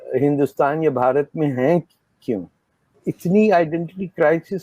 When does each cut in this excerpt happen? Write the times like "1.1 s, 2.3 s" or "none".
2.9 s

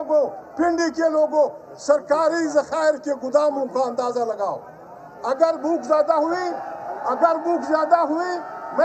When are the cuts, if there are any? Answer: 4.1 s

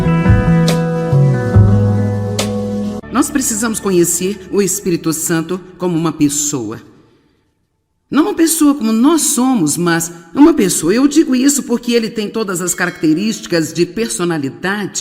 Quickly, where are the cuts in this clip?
3.0 s

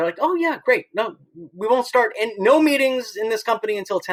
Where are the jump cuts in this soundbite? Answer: none

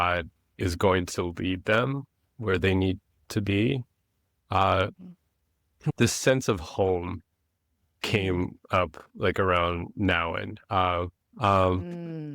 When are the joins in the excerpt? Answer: 11.3 s

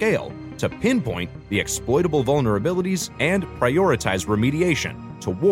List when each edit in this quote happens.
none

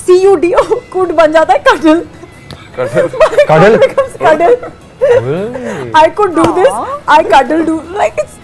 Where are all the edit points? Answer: none

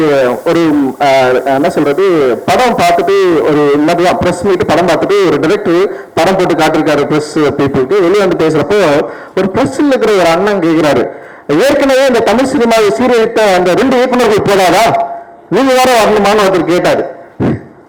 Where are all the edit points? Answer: none

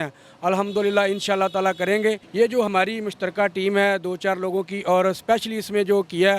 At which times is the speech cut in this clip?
2.7 s

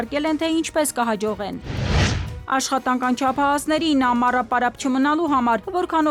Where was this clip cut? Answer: none

